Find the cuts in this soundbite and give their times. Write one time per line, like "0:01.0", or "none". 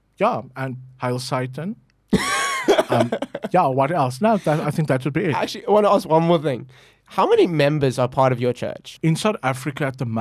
0:08.8